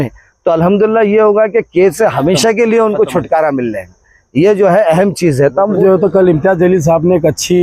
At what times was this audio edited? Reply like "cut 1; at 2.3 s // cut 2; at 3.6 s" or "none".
cut 1; at 5.8 s